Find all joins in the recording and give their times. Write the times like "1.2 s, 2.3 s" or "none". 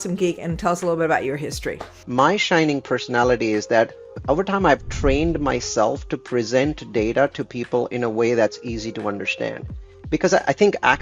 2.0 s, 4.2 s, 9.9 s